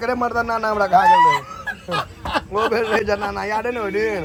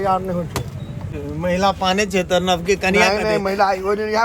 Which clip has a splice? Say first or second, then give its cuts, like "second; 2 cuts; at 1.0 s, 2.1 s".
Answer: second; 1 cut; at 1.0 s